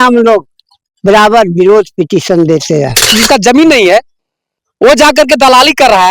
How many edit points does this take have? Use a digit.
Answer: 1